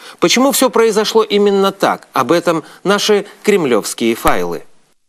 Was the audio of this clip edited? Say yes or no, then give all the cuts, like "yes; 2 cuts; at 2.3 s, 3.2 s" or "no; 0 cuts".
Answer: yes; 1 cut; at 3.6 s